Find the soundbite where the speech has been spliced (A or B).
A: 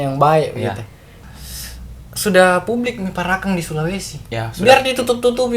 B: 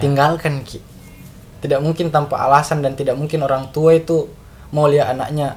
A